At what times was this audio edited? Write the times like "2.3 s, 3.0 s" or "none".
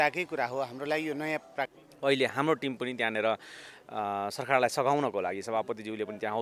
1.8 s